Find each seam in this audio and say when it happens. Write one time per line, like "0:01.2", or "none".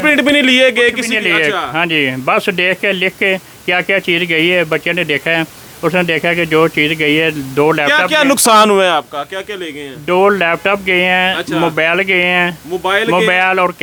none

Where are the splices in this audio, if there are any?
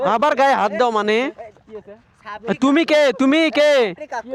none

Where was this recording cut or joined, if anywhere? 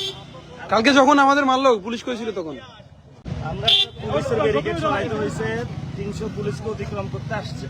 0:03.2

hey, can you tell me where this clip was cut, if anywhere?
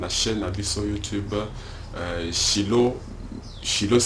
0:01.4

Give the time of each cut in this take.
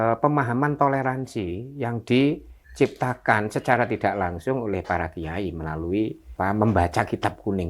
0:06.2

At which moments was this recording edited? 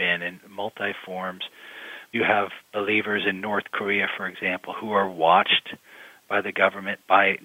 0:02.1

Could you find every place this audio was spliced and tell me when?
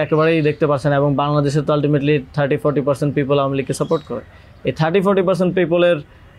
none

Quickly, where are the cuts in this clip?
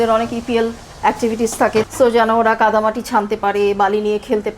0:01.8

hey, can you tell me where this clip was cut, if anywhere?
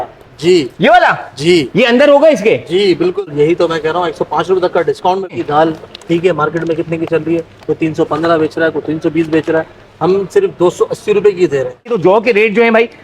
0:03.2
0:05.4
0:11.9

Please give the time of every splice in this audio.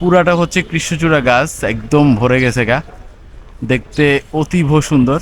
none

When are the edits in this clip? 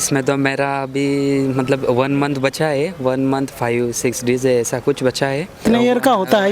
0:05.5

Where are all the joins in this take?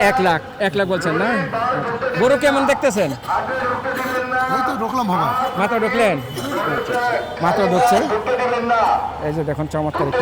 none

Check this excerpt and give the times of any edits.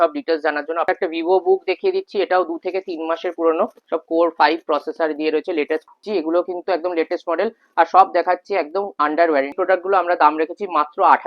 0:00.9
0:06.0
0:09.5

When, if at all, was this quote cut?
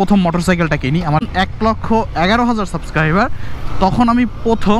0:01.3

